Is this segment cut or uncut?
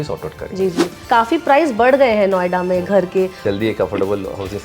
cut